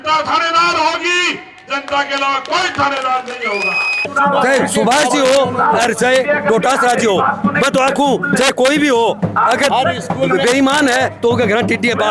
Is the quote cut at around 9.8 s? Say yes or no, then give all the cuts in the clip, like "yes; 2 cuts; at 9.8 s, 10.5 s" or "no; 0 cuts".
no; 1 cut; at 4.1 s